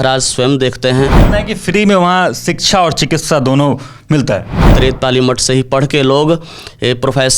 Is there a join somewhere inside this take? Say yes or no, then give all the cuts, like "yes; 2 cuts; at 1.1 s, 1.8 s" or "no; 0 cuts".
yes; 2 cuts; at 1.2 s, 4.7 s